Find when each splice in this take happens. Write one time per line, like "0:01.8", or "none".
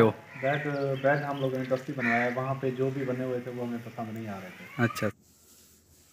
0:05.1